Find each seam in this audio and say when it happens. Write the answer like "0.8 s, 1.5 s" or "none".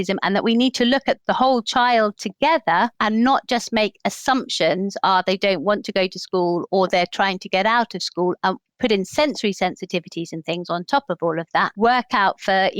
3.0 s, 6.6 s, 8.6 s, 11.7 s